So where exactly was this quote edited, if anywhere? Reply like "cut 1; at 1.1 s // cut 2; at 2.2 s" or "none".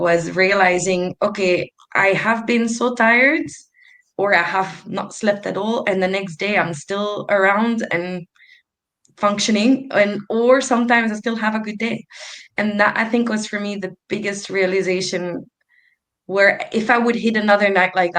none